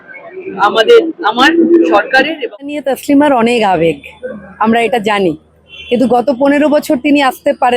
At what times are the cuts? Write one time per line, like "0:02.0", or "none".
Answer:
0:02.8